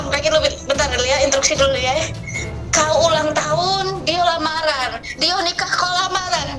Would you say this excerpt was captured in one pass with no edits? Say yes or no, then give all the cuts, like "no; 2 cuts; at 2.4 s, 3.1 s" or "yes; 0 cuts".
yes; 0 cuts